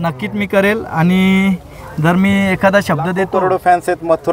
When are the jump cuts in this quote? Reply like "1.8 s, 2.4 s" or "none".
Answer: 3.2 s